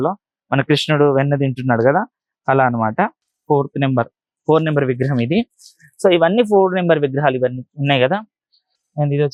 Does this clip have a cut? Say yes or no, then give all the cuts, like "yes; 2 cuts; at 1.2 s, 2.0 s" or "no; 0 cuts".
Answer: no; 0 cuts